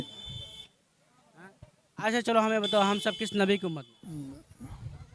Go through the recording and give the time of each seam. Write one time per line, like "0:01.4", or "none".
0:03.9